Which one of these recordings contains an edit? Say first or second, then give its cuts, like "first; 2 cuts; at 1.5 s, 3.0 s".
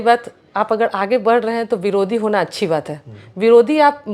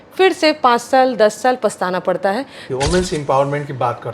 second; 1 cut; at 2.6 s